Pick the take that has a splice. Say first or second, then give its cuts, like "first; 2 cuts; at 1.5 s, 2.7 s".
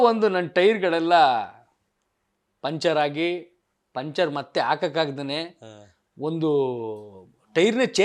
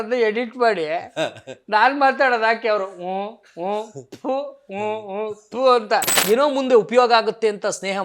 second; 1 cut; at 6.1 s